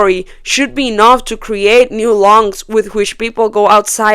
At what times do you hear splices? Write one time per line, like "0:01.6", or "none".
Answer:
none